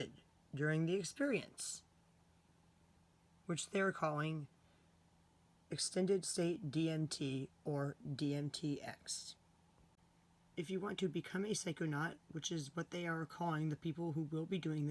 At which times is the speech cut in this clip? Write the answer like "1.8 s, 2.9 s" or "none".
10.0 s